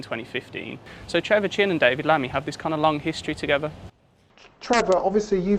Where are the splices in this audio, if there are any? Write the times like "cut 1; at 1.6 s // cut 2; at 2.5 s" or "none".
cut 1; at 0.9 s